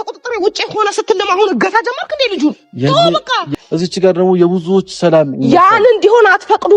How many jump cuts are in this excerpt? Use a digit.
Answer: 1